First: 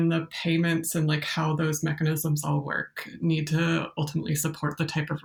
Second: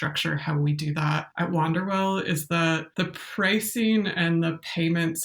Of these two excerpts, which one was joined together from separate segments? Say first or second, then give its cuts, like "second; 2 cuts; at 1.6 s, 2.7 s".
second; 2 cuts; at 1.3 s, 2.9 s